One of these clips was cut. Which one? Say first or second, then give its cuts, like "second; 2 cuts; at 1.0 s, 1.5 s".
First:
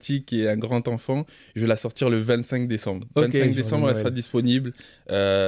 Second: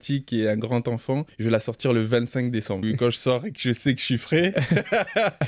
second; 2 cuts; at 1.3 s, 2.8 s